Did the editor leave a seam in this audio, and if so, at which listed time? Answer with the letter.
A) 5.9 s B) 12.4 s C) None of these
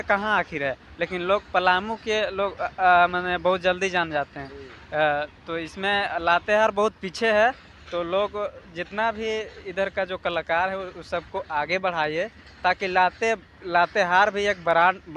C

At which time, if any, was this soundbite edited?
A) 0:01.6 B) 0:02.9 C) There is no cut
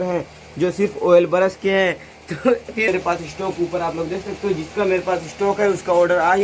B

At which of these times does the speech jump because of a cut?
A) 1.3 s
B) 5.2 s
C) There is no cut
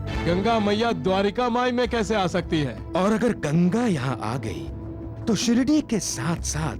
C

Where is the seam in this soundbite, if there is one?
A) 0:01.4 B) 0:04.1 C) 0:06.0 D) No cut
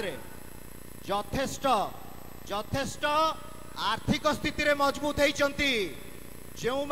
D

